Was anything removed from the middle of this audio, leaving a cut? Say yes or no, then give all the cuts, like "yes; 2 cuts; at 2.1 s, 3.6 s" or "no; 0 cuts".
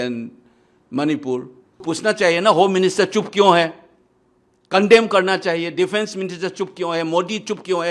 yes; 1 cut; at 1.8 s